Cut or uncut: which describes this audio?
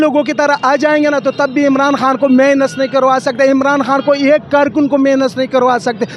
uncut